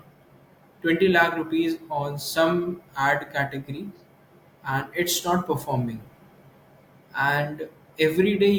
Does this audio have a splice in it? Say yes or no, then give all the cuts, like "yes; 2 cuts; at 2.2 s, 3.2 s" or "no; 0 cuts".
no; 0 cuts